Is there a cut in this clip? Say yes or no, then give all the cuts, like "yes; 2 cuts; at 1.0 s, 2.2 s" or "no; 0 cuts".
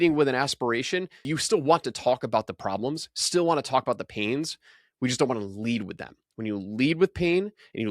yes; 1 cut; at 1.3 s